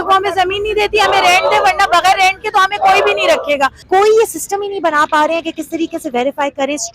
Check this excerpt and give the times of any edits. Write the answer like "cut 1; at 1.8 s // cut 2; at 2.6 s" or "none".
cut 1; at 3.8 s